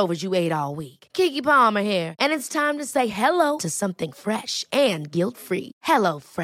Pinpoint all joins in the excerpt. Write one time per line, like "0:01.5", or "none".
none